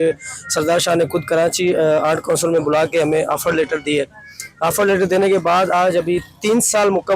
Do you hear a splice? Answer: no; 0 cuts

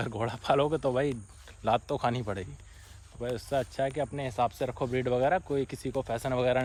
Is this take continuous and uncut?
yes; 0 cuts

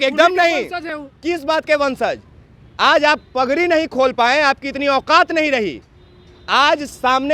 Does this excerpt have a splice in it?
no; 0 cuts

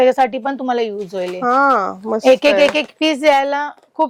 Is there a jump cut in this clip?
no; 0 cuts

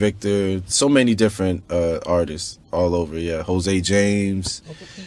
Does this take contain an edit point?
no; 0 cuts

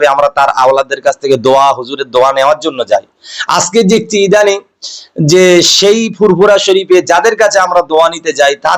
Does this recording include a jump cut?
no; 0 cuts

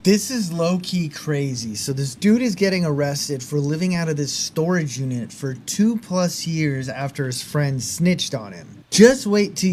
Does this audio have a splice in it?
no; 0 cuts

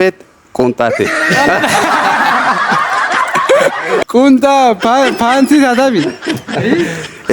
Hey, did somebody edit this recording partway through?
yes; 1 cut; at 4.0 s

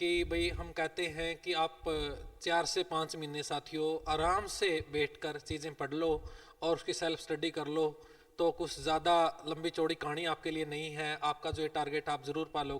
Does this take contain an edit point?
no; 0 cuts

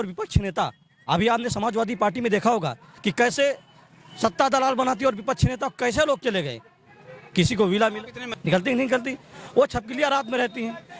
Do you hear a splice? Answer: yes; 1 cut; at 8.3 s

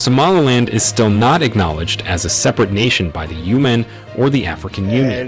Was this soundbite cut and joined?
no; 0 cuts

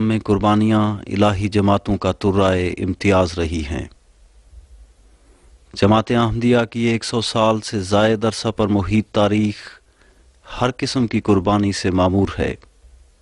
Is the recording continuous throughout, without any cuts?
yes; 0 cuts

